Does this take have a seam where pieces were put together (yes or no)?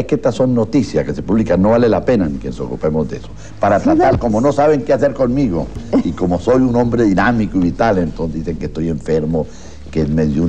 no